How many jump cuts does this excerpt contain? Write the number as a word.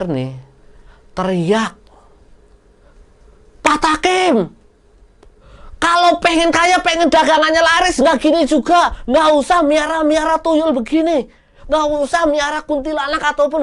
zero